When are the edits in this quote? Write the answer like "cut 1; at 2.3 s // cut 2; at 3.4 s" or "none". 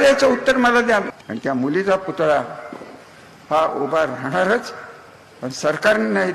cut 1; at 1.2 s

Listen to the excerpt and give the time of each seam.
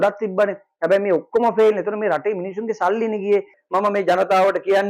cut 1; at 3.6 s

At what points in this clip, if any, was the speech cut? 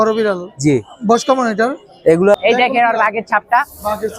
cut 1; at 2.3 s

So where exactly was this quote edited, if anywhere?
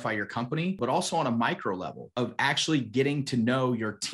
cut 1; at 0.8 s // cut 2; at 2.1 s

